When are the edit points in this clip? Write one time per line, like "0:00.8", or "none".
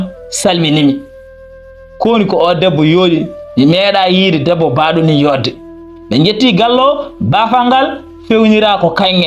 0:06.0

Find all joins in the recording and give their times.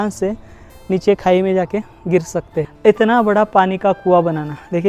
0:02.6

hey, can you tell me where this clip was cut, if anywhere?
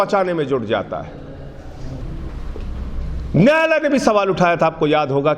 0:02.0

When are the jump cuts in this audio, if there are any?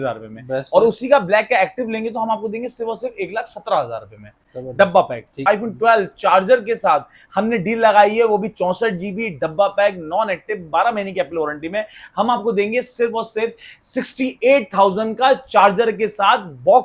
0:05.4

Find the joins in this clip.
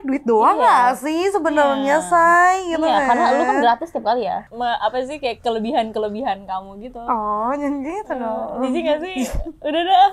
0:04.5

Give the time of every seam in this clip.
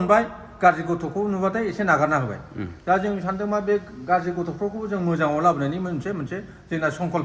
none

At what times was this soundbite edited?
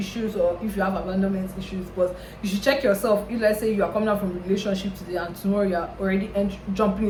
none

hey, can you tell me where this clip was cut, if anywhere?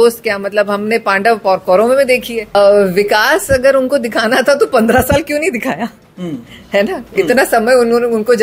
0:02.5

